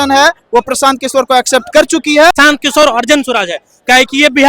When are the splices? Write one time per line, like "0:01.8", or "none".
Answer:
0:02.4